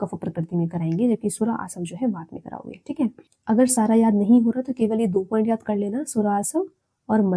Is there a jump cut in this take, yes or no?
no